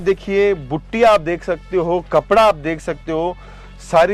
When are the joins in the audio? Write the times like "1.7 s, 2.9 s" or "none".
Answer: none